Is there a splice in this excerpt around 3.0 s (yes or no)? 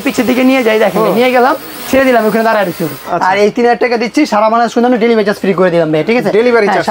yes